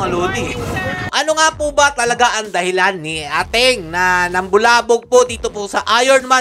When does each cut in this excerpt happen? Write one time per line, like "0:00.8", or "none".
0:01.0